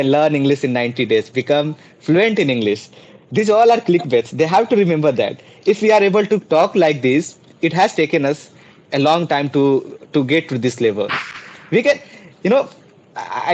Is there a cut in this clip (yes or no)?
no